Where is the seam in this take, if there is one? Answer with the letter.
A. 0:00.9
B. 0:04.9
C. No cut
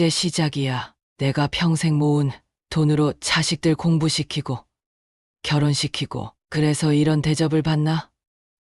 A